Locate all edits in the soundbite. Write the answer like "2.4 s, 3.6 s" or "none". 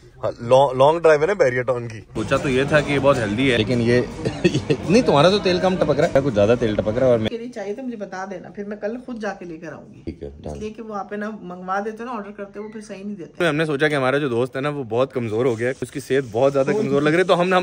2.2 s, 3.6 s, 6.1 s, 7.3 s, 10.1 s, 13.4 s, 15.9 s